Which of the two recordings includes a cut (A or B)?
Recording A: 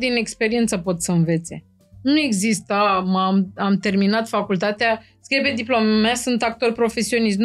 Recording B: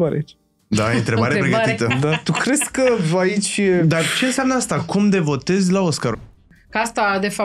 B